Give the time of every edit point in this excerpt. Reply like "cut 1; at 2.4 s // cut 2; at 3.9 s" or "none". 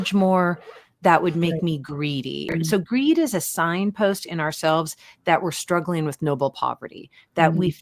cut 1; at 2.5 s